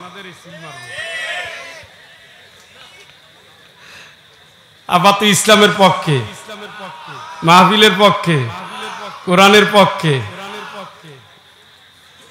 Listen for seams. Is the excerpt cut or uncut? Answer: uncut